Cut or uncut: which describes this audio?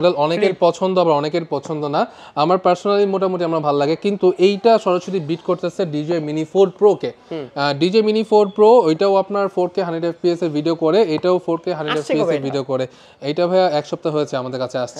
uncut